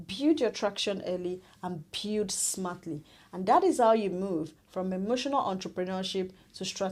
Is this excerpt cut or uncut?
uncut